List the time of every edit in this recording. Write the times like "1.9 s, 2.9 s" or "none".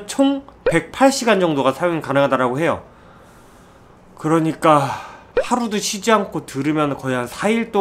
none